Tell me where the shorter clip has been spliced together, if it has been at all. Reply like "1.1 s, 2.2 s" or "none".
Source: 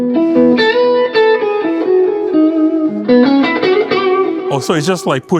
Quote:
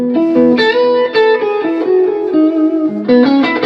none